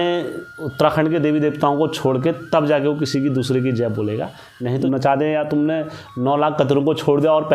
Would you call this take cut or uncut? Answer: cut